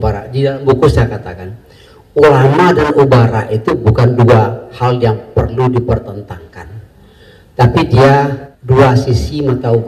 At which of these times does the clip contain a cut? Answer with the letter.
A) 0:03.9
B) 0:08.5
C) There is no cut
B